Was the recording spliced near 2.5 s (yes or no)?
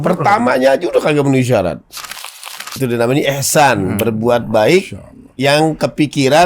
yes